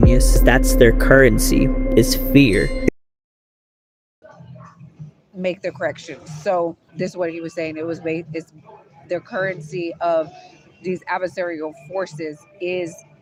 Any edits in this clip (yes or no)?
no